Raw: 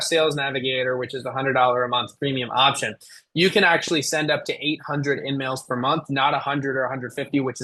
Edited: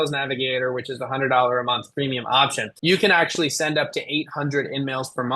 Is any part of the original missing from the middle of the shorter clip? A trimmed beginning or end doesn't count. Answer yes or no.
yes